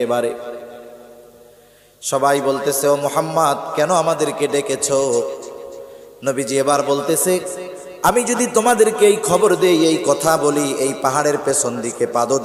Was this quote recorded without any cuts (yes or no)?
yes